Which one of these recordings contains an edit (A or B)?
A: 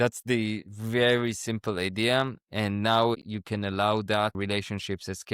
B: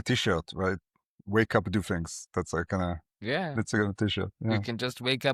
A